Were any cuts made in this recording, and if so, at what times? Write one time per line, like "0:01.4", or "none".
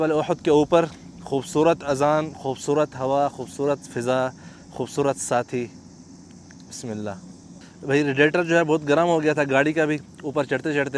none